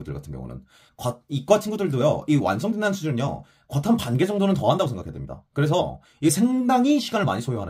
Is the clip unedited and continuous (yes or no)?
yes